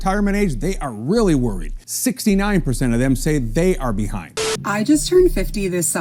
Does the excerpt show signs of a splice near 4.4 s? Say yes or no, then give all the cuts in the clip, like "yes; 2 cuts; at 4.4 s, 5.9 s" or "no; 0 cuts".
yes; 1 cut; at 4.4 s